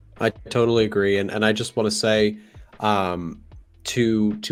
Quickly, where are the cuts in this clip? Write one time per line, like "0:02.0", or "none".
none